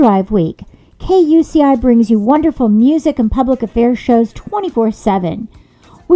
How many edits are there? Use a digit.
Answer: 0